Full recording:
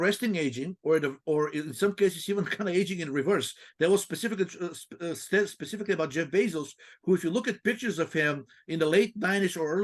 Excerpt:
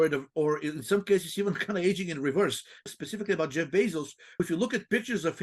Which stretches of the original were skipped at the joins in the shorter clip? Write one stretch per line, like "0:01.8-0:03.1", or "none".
0:03.8-0:05.5
0:07.0-0:07.1

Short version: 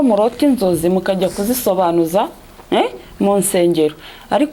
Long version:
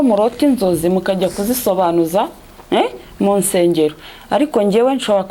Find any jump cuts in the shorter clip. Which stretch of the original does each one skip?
none

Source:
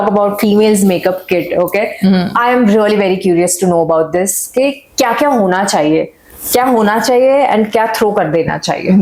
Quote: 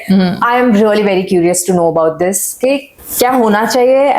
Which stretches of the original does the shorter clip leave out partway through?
0:04.8-0:06.2

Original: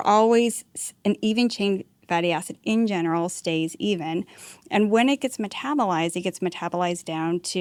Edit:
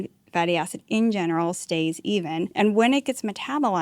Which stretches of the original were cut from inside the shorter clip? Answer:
0:04.3-0:04.7

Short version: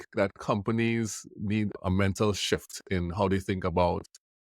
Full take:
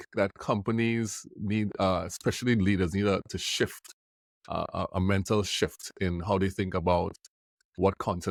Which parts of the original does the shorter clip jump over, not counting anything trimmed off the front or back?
0:01.8-0:04.9

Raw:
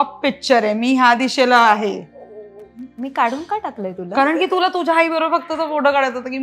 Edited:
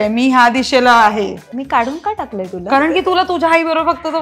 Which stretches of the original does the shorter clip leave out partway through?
0:02.1-0:02.9

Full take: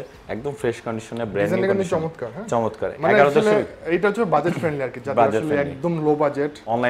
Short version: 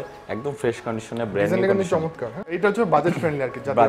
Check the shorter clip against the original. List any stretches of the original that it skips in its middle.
0:02.4-0:03.8

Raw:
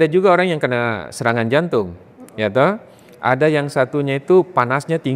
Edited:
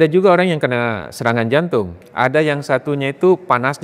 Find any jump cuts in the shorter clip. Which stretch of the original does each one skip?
0:02.0-0:03.1

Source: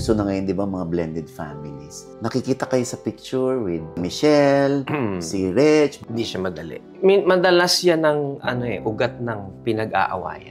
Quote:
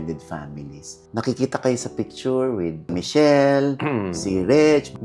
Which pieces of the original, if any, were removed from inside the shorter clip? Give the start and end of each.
none

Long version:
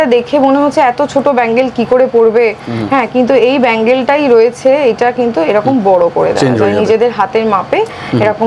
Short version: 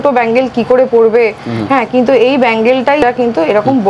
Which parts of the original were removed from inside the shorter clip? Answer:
0:04.2-0:05.0

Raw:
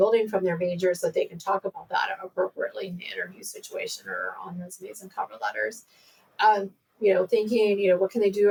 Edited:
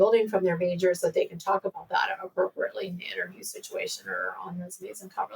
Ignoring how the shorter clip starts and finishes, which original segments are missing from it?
none

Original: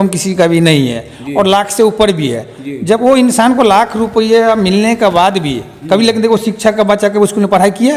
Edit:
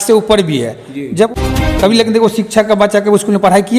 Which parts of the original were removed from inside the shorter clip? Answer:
0:03.0-0:05.4

